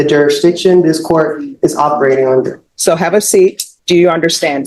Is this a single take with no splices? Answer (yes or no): no